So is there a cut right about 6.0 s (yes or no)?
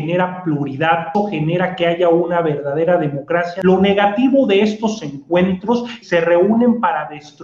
yes